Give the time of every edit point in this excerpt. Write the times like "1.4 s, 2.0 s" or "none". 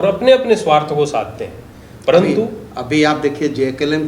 none